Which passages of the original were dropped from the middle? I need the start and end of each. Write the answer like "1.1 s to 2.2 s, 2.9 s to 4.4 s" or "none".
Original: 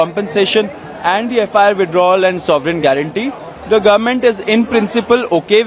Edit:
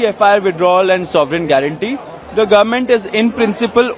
none